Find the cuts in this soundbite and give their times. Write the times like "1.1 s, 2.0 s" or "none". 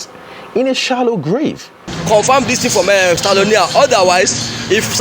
1.7 s